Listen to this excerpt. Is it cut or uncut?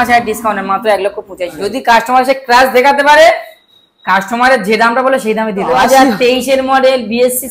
cut